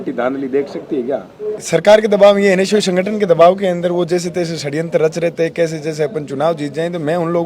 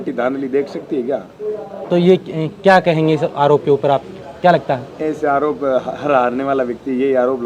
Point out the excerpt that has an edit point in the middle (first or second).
first